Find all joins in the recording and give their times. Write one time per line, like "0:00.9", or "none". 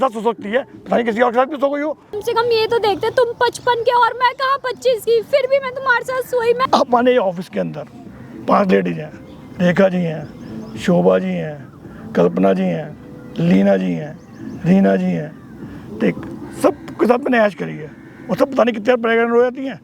0:02.2
0:06.7